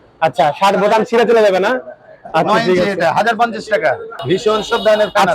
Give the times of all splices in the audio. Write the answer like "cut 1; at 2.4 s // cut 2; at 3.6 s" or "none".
cut 1; at 4.1 s

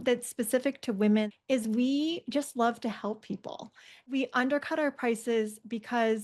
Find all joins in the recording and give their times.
cut 1; at 1.2 s // cut 2; at 4.1 s

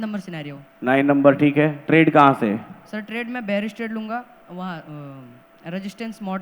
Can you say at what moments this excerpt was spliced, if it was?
cut 1; at 1.8 s

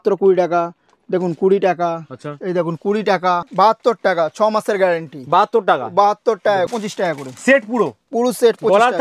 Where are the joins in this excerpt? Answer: cut 1; at 3.5 s // cut 2; at 6.7 s

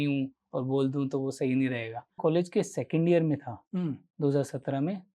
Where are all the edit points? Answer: cut 1; at 2.2 s

